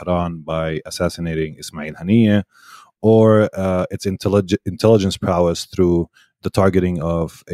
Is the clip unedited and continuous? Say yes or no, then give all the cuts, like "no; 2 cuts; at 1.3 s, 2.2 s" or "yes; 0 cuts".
yes; 0 cuts